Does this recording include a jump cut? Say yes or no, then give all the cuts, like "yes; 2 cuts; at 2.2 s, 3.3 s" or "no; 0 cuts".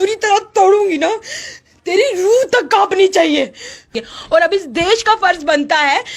yes; 1 cut; at 3.9 s